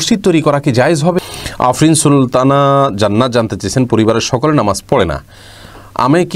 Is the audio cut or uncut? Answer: cut